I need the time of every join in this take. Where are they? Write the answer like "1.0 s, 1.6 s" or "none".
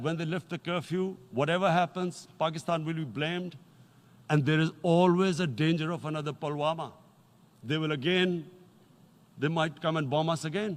none